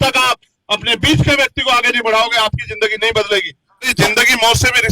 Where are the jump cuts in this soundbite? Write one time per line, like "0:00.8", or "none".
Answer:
0:03.9